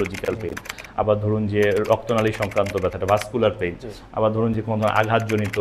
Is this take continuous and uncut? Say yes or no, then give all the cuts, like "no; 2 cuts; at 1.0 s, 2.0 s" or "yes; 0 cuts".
yes; 0 cuts